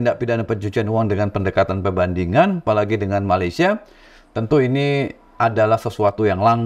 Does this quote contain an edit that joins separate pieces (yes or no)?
no